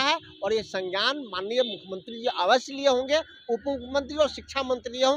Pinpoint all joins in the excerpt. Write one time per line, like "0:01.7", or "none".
none